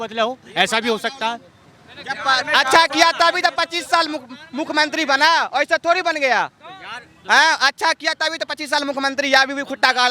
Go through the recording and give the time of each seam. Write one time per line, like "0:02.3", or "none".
none